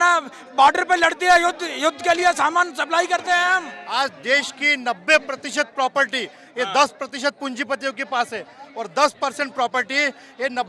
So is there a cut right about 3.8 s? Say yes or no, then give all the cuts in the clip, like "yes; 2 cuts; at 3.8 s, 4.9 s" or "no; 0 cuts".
yes; 1 cut; at 3.8 s